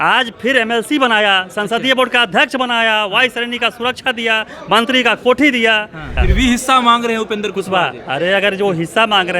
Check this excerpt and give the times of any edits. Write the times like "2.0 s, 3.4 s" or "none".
6.2 s